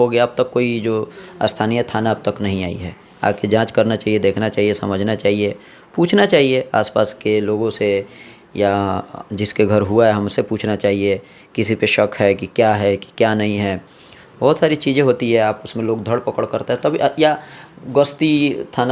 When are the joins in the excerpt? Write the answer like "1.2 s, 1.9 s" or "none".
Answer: none